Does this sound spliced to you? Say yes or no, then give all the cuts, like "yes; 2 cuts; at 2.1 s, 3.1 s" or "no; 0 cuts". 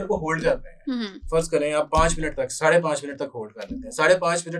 no; 0 cuts